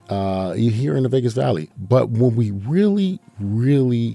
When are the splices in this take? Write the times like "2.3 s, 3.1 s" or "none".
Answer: 1.7 s